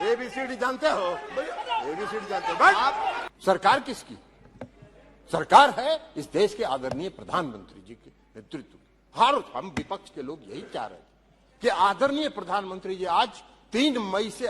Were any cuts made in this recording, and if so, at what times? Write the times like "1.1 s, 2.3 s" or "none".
3.2 s